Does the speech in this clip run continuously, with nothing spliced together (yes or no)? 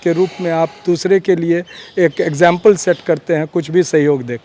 yes